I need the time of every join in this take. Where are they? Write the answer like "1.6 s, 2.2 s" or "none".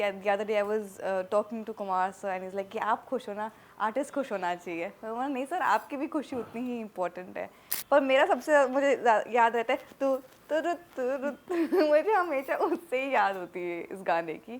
7.7 s